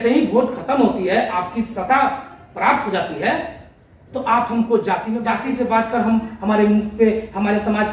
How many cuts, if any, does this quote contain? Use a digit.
1